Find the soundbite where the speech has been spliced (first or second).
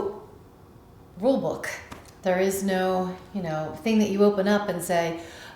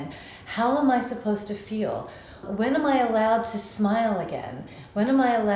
second